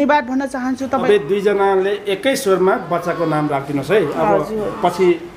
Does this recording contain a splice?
yes; 1 cut; at 1.0 s

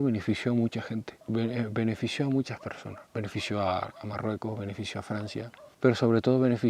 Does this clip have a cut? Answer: no; 0 cuts

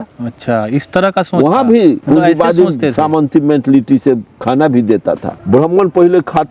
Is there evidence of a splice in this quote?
yes; 2 cuts; at 2.0 s, 5.3 s

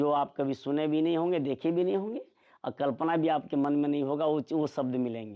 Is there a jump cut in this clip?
no; 0 cuts

